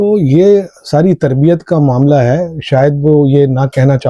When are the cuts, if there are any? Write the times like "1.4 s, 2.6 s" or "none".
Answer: none

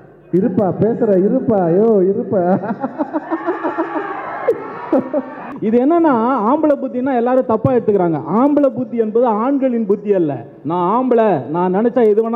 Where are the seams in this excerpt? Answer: 5.4 s

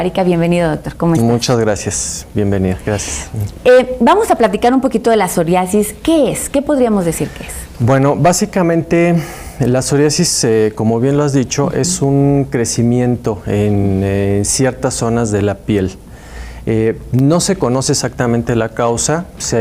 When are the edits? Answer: 17.3 s

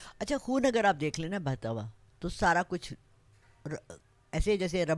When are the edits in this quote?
none

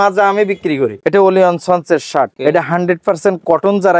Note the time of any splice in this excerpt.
1.0 s, 2.3 s

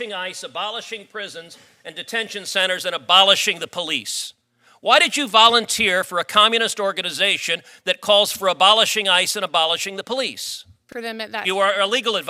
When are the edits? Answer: 10.9 s

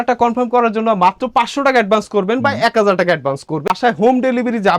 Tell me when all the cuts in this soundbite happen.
3.7 s

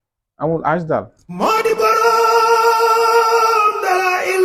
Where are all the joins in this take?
1.2 s

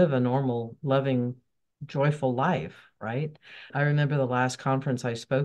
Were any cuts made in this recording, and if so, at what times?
3.7 s

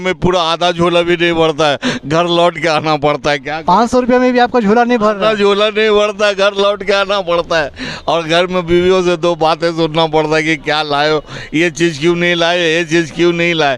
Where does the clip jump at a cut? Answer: none

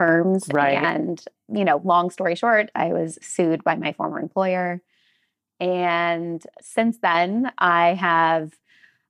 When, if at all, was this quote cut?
1.3 s, 2.7 s

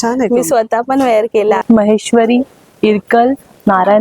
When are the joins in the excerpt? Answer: 1.6 s

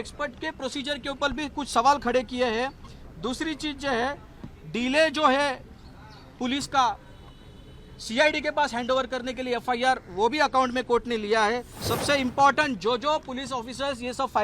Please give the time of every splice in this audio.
11.7 s

